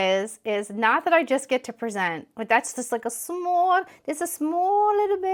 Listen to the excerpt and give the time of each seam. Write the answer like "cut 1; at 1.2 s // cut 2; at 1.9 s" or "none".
none